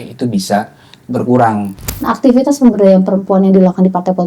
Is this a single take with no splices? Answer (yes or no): no